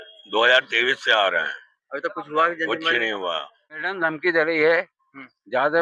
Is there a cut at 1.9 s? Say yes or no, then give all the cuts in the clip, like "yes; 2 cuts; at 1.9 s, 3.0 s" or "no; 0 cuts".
no; 1 cut; at 3.7 s